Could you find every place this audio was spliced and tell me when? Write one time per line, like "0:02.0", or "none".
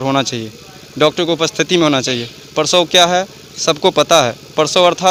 none